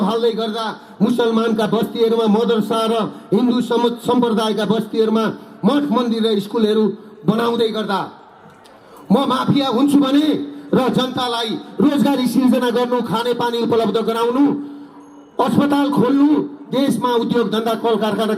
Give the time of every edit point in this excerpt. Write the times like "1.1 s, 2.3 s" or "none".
none

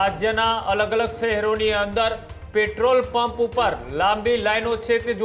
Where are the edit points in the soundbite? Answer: none

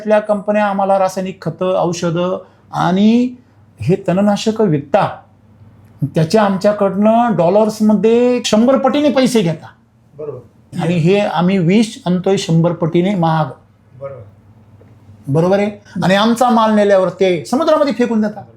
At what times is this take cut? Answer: none

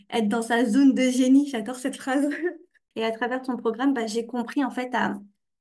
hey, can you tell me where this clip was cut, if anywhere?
2.8 s

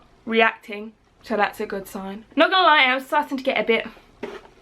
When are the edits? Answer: 2.3 s

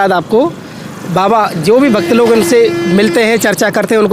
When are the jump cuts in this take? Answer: none

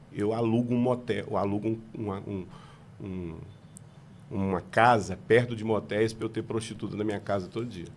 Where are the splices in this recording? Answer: none

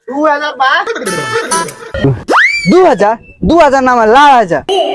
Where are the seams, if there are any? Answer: 2.0 s

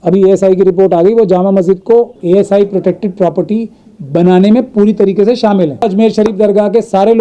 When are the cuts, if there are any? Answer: 2.2 s, 5.8 s

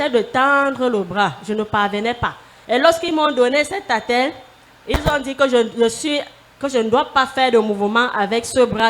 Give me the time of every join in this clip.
2.5 s

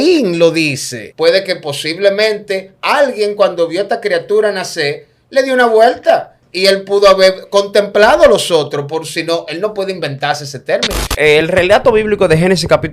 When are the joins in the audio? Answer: 1.0 s, 11.1 s

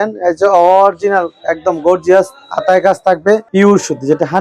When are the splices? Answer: 3.5 s

